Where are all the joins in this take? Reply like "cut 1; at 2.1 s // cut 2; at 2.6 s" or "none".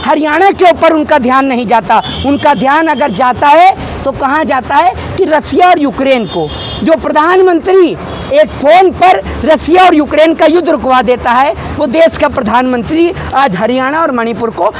none